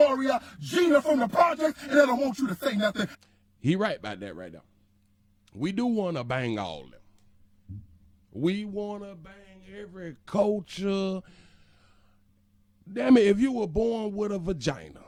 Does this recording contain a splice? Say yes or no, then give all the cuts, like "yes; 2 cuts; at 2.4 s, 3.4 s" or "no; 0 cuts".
no; 0 cuts